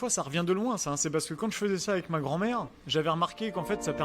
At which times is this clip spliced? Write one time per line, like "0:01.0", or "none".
0:02.8